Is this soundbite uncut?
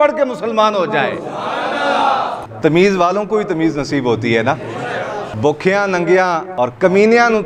no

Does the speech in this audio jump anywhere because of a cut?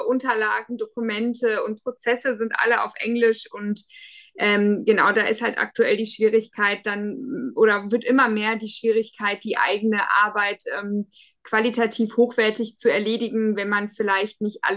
no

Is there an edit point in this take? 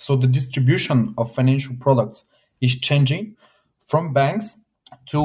no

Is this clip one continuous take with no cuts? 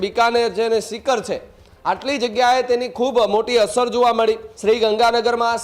no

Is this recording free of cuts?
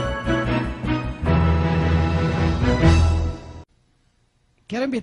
yes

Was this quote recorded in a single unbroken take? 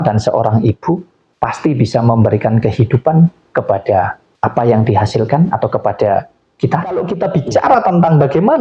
no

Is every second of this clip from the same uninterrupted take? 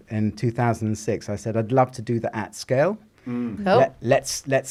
yes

